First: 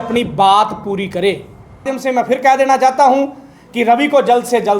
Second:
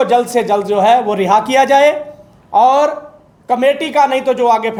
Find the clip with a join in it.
first; 1 cut; at 1.9 s

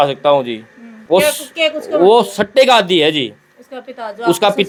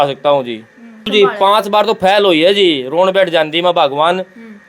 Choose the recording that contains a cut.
second; 1 cut; at 1.1 s

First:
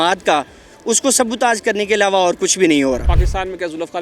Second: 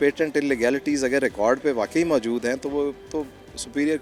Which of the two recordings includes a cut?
first; 1 cut; at 3.1 s

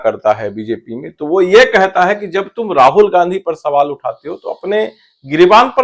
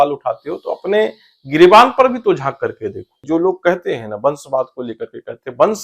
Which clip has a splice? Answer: second; 1 cut; at 3.2 s

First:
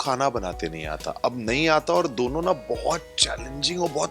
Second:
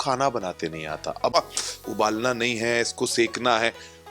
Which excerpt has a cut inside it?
second; 1 cut; at 1.3 s

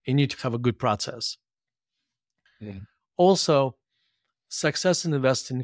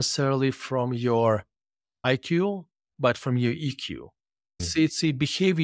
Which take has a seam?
second; 1 cut; at 2.0 s

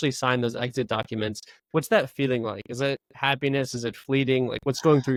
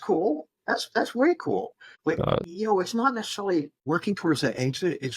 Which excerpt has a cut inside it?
second; 2 cuts; at 2.1 s, 3.8 s

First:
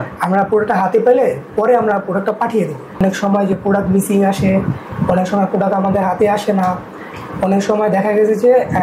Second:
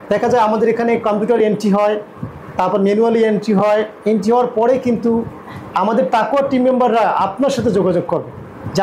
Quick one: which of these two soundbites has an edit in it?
first; 1 cut; at 2.9 s

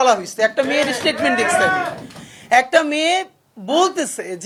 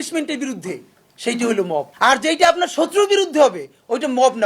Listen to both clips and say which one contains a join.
second; 1 cut; at 1.9 s

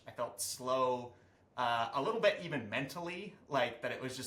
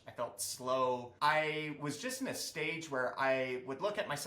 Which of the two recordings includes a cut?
second; 1 cut; at 1.1 s

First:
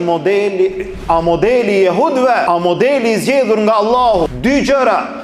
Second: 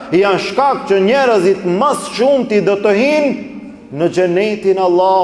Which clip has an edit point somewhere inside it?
first; 3 cuts; at 0.9 s, 2.4 s, 4.3 s

